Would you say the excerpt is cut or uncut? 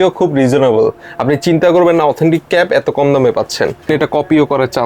cut